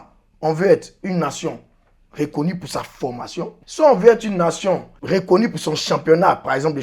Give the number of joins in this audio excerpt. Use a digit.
2